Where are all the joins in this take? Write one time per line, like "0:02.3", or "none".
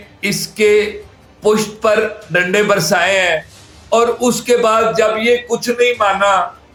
none